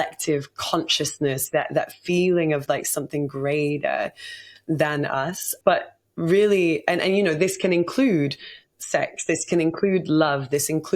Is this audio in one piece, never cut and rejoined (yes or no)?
no